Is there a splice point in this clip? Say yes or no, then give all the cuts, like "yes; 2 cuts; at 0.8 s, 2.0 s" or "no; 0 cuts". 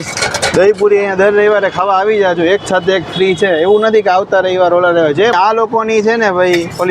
yes; 1 cut; at 5.3 s